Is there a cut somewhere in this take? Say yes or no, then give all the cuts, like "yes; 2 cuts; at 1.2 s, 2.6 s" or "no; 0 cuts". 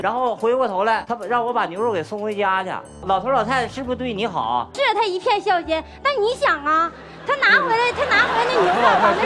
yes; 1 cut; at 1.1 s